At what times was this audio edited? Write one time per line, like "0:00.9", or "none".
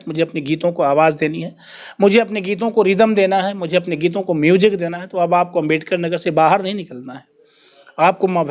none

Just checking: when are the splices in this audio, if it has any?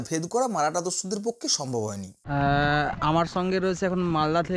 0:02.1

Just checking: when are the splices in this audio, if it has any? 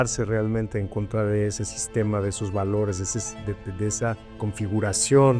0:04.4

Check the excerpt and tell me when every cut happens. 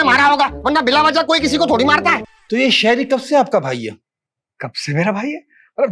0:02.2

